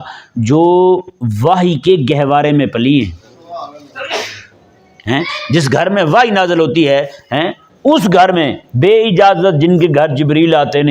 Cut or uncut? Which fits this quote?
uncut